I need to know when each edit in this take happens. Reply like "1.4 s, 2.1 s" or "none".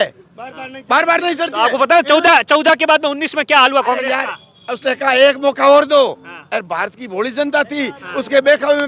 none